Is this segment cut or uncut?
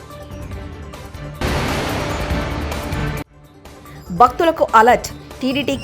cut